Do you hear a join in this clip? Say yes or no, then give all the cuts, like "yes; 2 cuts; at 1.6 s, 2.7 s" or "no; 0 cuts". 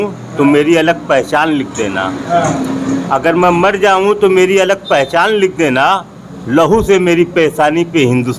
no; 0 cuts